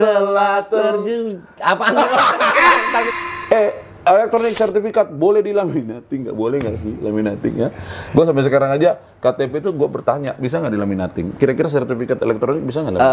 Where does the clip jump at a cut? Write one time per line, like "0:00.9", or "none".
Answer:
0:03.1